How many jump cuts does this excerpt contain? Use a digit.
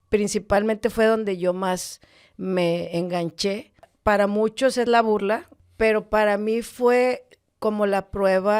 2